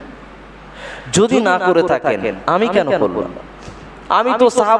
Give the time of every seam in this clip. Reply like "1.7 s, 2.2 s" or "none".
none